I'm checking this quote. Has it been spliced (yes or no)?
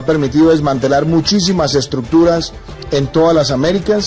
no